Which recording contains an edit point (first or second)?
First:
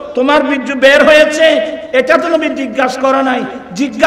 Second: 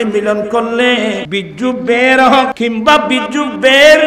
second